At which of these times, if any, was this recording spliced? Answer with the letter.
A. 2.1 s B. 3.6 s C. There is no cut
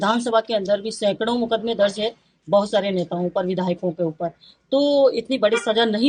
C